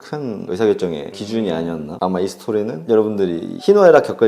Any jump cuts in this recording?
yes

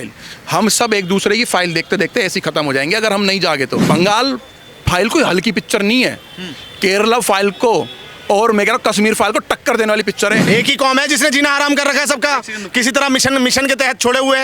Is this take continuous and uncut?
no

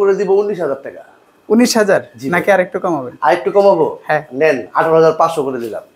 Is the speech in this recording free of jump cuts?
yes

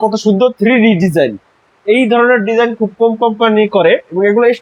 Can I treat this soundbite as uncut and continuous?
yes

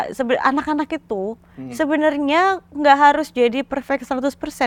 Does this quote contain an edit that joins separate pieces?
no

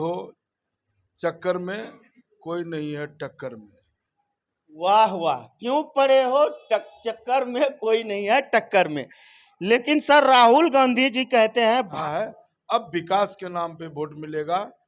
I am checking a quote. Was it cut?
yes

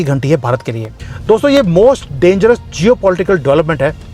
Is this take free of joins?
no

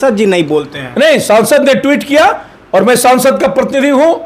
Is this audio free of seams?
yes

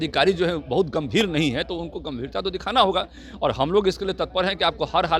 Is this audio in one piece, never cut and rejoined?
yes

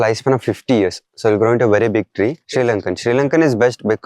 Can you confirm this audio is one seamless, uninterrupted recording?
no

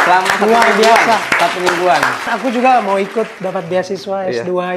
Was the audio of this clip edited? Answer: yes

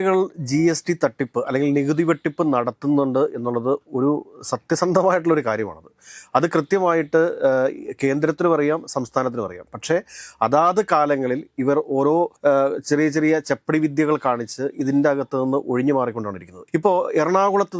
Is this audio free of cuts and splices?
yes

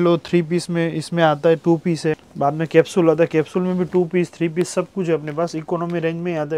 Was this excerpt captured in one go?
no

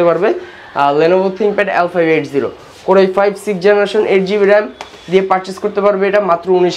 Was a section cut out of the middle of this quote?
no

